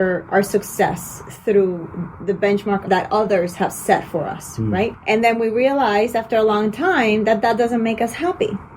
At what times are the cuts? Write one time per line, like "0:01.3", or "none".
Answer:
0:02.8
0:05.0